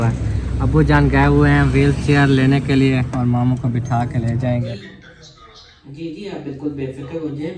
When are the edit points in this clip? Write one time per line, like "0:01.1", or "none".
0:04.7